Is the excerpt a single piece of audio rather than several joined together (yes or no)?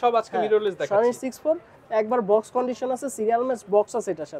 yes